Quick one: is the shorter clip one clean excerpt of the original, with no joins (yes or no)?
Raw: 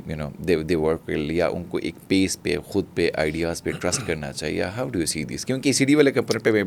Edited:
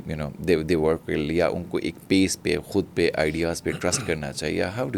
yes